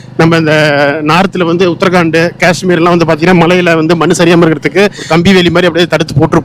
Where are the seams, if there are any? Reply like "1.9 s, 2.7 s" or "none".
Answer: 5.1 s